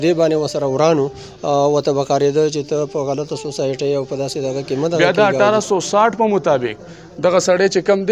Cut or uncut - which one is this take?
cut